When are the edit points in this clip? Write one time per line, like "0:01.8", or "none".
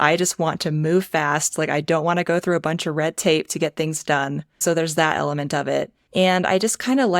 0:04.5
0:06.0

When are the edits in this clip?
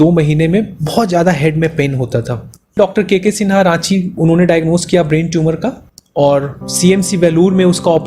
0:02.8

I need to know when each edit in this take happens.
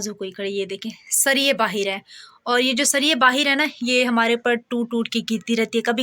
none

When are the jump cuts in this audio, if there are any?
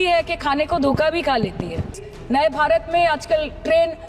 0:02.1

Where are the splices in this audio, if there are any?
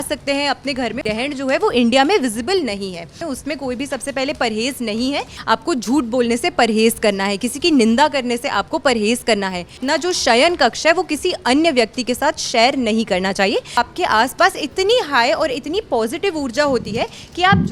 0:01.0
0:03.3
0:05.3
0:09.8
0:13.8

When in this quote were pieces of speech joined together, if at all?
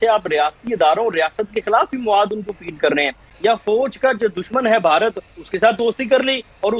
0:03.3

